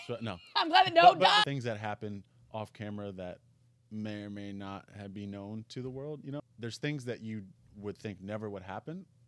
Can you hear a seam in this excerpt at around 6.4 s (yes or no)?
yes